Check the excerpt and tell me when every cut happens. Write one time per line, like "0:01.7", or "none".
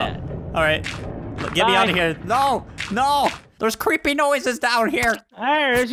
0:03.5